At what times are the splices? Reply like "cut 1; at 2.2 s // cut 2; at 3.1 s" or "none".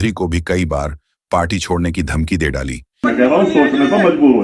cut 1; at 3.0 s